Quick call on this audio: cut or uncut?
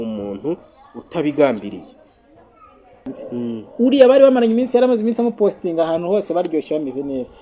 cut